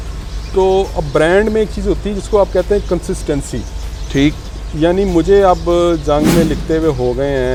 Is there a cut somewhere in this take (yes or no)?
no